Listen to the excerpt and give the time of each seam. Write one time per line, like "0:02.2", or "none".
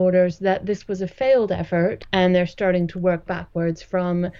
0:02.0